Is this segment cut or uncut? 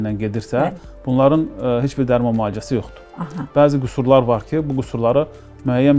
uncut